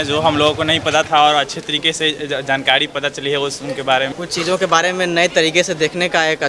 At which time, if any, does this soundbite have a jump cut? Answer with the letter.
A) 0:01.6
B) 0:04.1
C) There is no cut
B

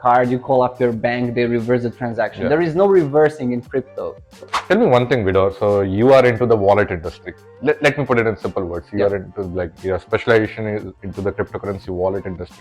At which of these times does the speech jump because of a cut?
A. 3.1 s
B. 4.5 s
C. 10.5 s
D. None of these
B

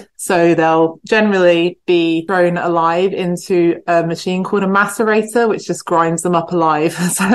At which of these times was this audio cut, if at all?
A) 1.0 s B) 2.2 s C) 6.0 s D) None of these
B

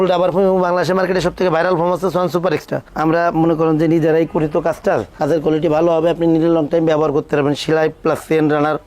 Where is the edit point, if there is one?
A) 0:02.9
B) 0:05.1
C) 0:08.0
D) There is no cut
A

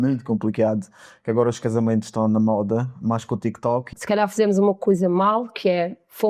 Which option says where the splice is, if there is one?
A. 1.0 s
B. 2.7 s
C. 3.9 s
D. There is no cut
C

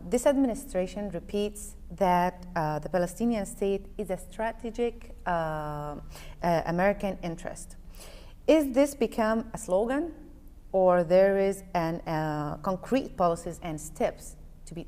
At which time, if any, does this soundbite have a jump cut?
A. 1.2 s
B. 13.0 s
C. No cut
B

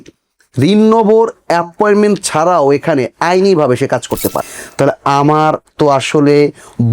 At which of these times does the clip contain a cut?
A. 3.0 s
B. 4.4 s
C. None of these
B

